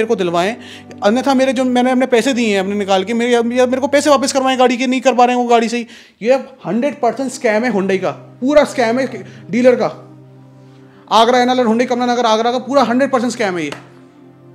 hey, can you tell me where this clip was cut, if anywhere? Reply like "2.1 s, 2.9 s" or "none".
none